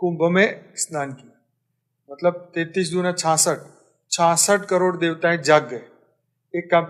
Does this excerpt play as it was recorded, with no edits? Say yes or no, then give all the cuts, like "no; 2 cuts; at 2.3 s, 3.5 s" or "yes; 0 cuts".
yes; 0 cuts